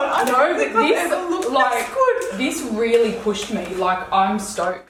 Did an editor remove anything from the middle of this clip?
no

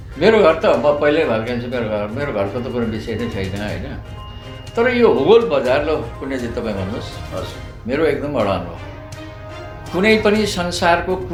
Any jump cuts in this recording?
no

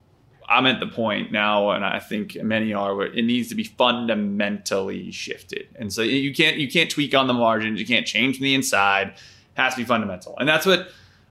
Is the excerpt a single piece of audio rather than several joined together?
yes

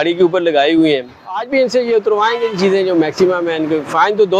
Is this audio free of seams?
yes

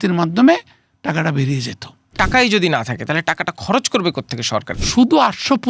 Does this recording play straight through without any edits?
no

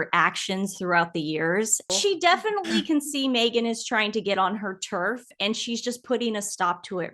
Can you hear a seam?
yes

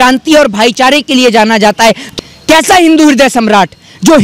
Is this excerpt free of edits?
no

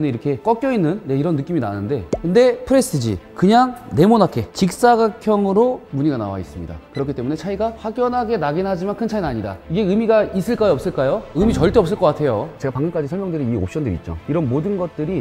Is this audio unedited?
no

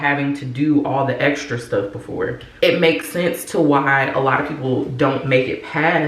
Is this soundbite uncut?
no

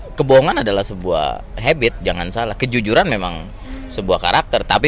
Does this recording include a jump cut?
no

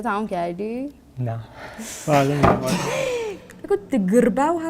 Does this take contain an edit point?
yes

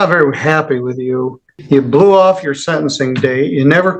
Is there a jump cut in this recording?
yes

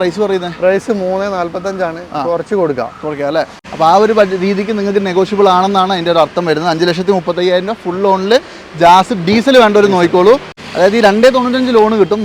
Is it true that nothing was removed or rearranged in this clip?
no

